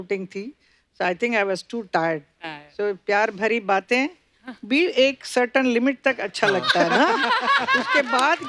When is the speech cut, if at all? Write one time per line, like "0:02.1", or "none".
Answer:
none